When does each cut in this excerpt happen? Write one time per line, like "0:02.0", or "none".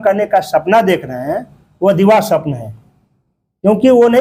none